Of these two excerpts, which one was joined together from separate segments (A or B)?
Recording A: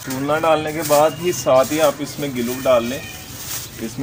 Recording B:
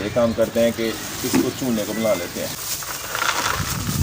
B